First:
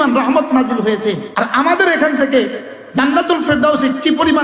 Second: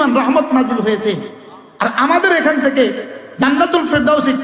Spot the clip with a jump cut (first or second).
first